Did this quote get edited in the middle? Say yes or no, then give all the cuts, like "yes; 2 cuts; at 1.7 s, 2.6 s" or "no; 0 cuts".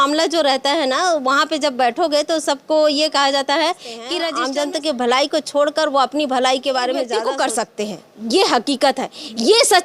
yes; 2 cuts; at 4.2 s, 7.1 s